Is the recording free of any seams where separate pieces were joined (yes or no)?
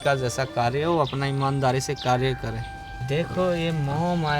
no